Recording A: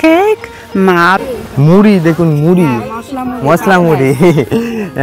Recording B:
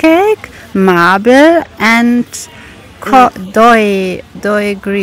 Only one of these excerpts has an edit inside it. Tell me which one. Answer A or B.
A